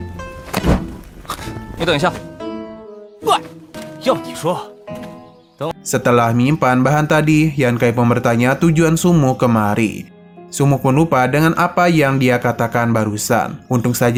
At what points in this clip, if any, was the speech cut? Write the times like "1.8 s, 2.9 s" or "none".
none